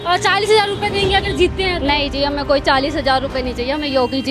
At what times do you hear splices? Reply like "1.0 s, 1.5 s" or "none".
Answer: none